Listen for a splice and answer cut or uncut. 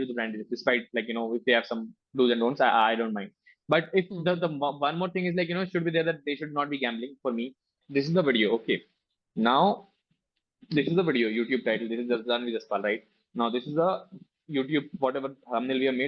cut